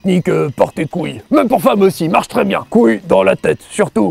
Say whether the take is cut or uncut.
cut